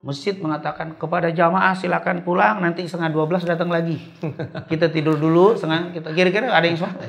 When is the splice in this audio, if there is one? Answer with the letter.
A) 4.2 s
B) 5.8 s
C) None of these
C